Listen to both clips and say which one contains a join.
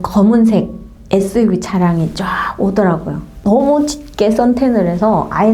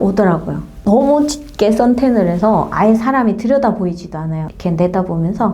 second; 1 cut; at 4.5 s

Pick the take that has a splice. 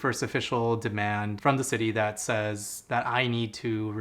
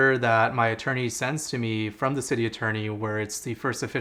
first; 1 cut; at 1.3 s

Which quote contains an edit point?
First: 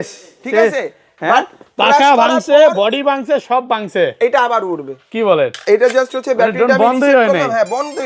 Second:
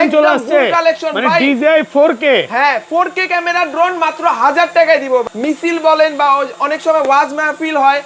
second; 1 cut; at 5.2 s

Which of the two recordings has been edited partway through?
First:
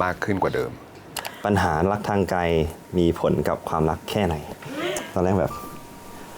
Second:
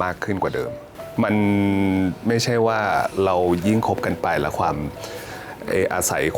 first; 2 cuts; at 1.0 s, 5.0 s

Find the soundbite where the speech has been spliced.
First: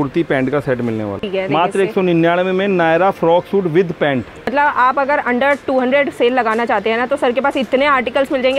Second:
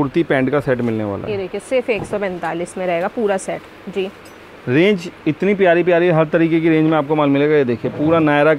first; 2 cuts; at 1.2 s, 4.4 s

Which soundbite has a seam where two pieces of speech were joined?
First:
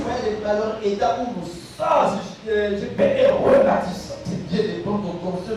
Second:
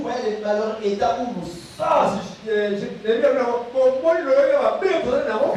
first; 2 cuts; at 3.0 s, 4.2 s

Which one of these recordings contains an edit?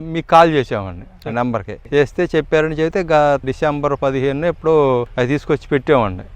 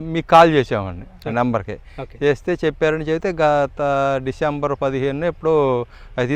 first; 3 cuts; at 1.8 s, 3.4 s, 5.1 s

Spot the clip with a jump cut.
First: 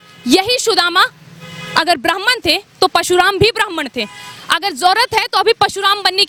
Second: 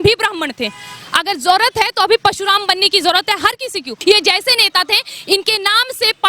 second; 1 cut; at 3.9 s

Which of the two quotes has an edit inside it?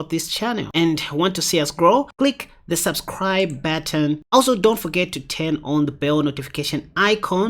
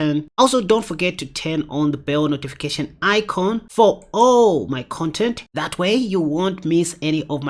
first; 1 cut; at 2.1 s

